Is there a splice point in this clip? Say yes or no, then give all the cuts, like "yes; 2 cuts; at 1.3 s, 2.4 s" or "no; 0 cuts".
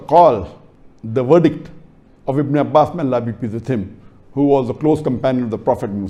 no; 0 cuts